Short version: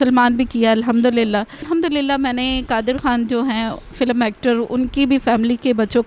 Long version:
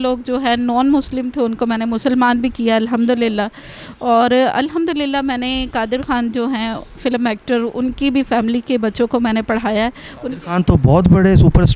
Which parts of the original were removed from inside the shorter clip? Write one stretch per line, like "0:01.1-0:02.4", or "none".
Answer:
0:03.7-0:04.7